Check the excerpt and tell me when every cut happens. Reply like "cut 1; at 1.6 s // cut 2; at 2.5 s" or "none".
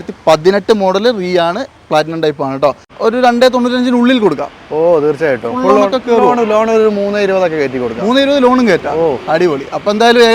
cut 1; at 2.9 s